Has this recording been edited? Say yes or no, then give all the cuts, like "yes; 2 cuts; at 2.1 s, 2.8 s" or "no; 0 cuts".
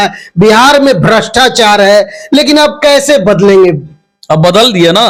no; 0 cuts